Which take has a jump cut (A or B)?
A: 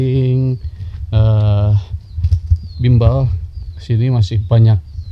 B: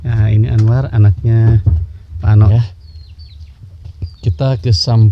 B